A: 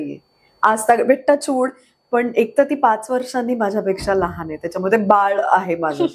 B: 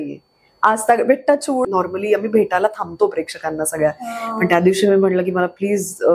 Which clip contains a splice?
B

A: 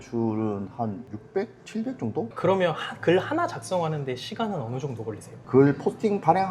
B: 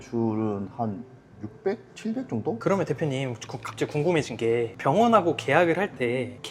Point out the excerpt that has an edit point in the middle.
A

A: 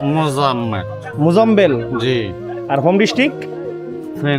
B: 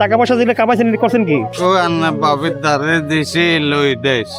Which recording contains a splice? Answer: B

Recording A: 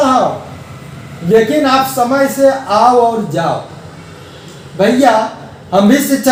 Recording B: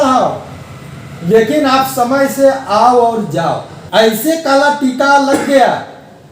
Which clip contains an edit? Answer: B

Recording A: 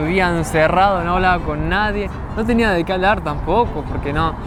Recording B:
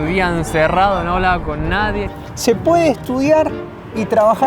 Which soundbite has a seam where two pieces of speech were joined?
B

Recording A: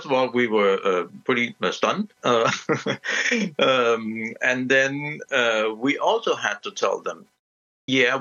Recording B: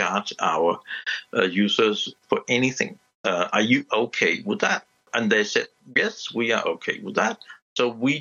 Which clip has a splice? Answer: B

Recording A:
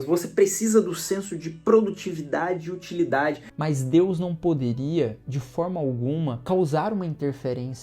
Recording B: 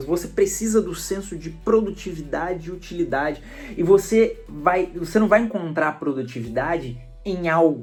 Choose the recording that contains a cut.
A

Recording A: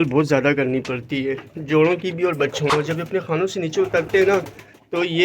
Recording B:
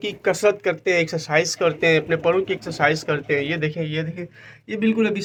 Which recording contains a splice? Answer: A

